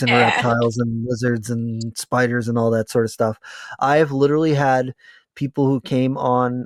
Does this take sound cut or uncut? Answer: uncut